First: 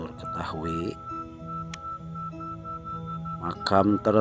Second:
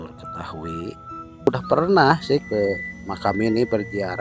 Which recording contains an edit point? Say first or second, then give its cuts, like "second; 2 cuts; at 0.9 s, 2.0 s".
second; 1 cut; at 1.5 s